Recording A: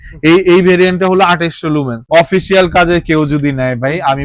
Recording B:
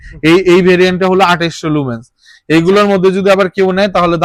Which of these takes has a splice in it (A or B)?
A